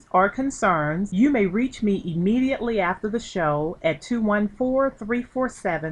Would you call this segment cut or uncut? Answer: cut